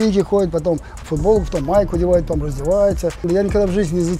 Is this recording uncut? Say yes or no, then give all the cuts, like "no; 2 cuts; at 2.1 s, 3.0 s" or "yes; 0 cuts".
no; 1 cut; at 3.2 s